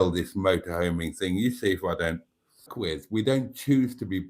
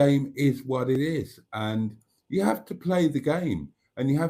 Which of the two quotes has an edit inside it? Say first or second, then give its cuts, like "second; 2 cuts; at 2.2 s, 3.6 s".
first; 1 cut; at 2.7 s